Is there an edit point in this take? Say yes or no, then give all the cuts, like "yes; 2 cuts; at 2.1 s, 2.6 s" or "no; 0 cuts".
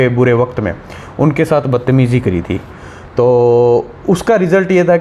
no; 0 cuts